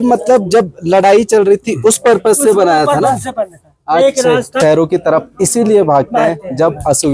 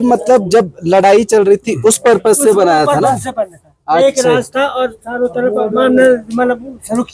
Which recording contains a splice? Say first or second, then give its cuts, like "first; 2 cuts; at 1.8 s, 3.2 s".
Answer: first; 1 cut; at 4.6 s